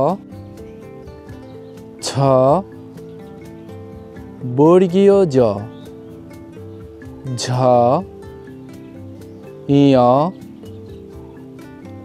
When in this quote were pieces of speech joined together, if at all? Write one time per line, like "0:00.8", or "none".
none